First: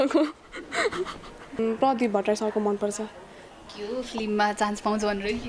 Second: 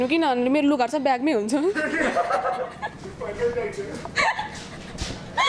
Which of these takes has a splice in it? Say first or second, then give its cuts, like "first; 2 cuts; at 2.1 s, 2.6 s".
first; 1 cut; at 1.6 s